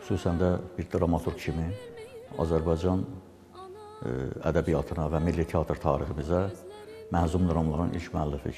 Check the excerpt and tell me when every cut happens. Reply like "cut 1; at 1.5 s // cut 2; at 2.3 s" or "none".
none